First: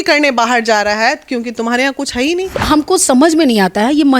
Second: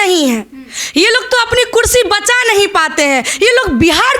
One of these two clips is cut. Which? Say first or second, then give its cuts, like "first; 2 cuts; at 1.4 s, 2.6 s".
first; 1 cut; at 2.5 s